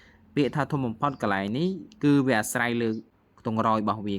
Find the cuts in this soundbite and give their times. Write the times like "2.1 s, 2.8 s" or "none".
3.1 s